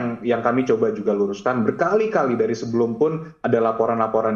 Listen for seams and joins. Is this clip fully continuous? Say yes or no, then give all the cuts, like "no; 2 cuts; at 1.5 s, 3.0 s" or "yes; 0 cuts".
yes; 0 cuts